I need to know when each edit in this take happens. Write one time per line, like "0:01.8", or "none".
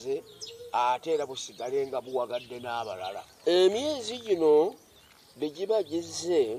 0:03.3